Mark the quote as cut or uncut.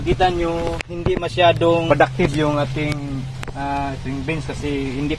cut